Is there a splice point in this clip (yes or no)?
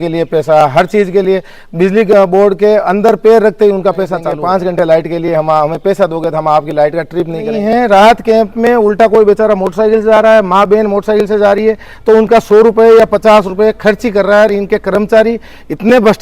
yes